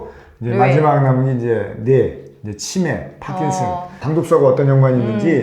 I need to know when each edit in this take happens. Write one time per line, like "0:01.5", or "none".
0:04.0